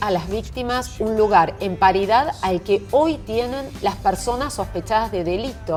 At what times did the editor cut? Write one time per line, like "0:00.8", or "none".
none